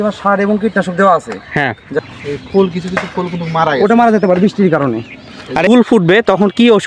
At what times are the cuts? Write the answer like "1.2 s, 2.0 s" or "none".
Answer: 2.0 s, 5.7 s